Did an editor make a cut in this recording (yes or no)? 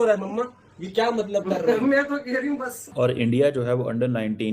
yes